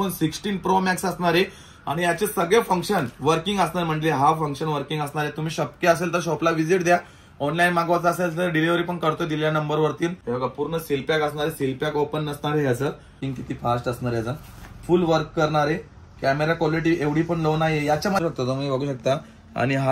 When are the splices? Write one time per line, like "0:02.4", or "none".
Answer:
0:10.2
0:13.2
0:18.2